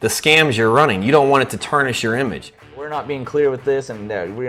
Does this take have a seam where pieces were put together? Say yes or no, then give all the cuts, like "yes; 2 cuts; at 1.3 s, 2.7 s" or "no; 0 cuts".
yes; 1 cut; at 2.9 s